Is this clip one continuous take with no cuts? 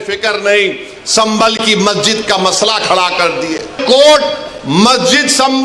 no; 1 cut; at 3.8 s

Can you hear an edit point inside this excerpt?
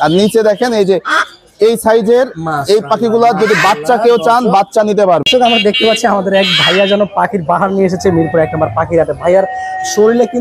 yes; 1 cut; at 5.2 s

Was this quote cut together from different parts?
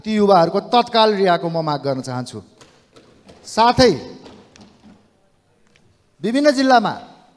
no; 0 cuts

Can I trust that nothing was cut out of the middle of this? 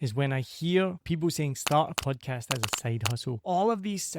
no; 2 cuts; at 1.0 s, 3.4 s

